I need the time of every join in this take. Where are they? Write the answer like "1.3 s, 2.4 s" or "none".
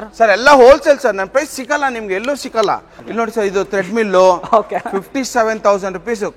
3.0 s